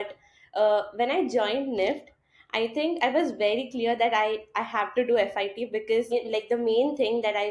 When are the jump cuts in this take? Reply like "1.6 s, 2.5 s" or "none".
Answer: 6.1 s